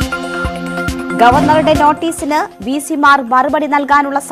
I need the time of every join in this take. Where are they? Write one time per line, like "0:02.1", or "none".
none